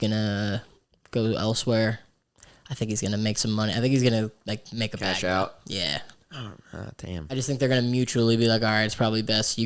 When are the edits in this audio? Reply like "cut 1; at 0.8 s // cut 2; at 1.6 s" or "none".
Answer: none